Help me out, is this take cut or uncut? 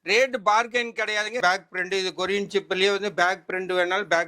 cut